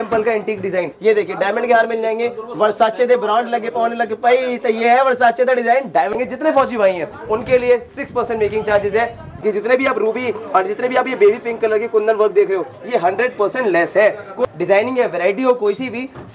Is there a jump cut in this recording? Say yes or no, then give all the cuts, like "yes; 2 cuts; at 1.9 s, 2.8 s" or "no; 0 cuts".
yes; 4 cuts; at 0.9 s, 6.1 s, 9.3 s, 14.4 s